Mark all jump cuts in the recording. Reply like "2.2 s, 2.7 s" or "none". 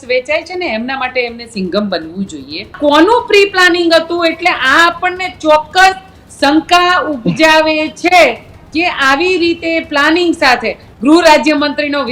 2.8 s, 10.8 s